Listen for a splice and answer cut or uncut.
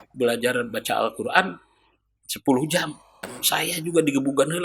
cut